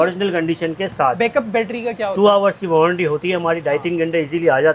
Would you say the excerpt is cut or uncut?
cut